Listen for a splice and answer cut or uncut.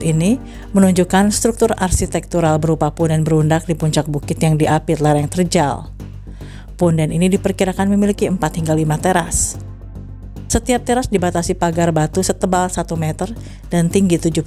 uncut